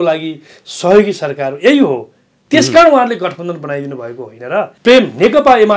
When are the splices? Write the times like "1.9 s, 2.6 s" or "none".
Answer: 4.7 s